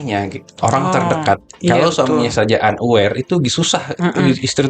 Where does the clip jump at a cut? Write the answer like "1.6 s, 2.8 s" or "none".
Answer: none